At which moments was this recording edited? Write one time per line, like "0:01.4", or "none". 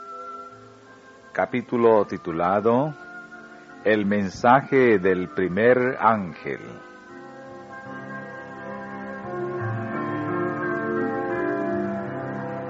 0:04.3